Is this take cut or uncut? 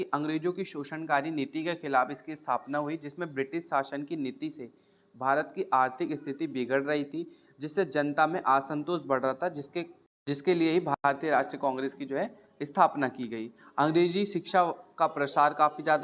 uncut